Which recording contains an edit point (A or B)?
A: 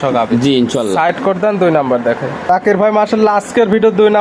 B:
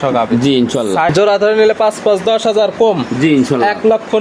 B